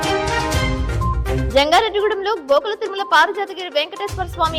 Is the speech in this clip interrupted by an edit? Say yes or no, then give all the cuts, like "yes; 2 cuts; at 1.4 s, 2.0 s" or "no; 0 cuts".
yes; 1 cut; at 1.4 s